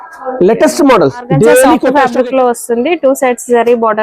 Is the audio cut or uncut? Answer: cut